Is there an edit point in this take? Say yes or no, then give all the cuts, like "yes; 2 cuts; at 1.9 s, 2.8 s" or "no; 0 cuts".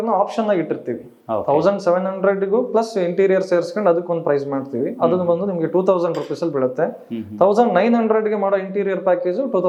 no; 0 cuts